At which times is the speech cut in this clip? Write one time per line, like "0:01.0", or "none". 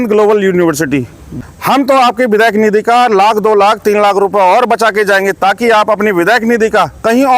0:01.3